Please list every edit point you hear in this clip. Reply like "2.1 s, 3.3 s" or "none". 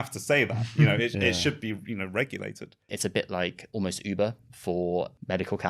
2.9 s

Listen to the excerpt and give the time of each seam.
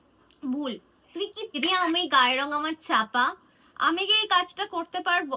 1.6 s

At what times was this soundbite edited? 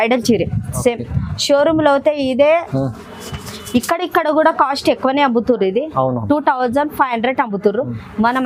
none

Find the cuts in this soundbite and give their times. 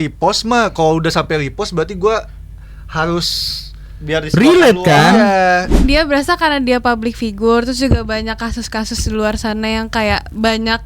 5.8 s

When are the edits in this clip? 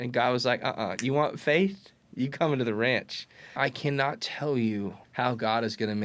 3.6 s, 5.0 s

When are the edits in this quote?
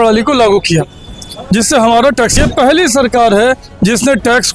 2.4 s

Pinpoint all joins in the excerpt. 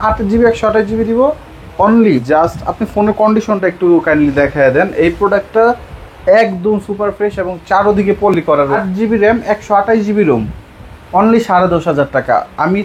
2.2 s, 8.7 s

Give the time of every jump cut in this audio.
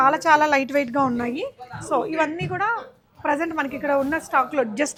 none

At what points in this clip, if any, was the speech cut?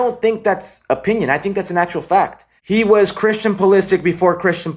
2.5 s

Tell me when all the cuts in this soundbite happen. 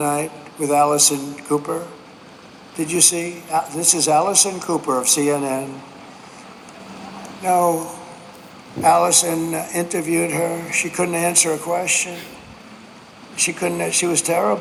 none

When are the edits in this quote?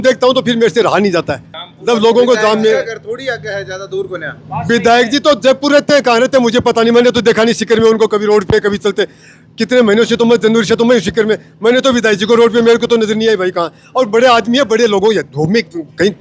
none

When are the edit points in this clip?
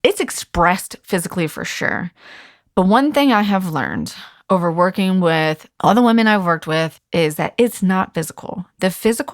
5.7 s, 7.0 s

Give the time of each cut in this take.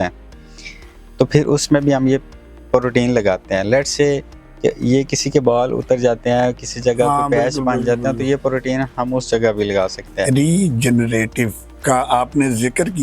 10.3 s

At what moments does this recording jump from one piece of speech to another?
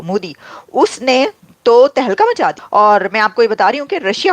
2.6 s

